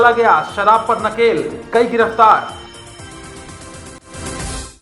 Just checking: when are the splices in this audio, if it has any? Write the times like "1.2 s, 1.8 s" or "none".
3.9 s